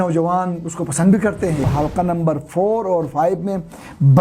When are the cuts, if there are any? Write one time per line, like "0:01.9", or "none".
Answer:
0:01.6